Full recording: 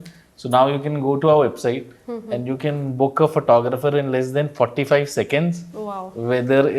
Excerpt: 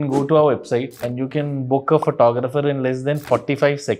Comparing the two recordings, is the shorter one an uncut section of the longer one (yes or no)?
no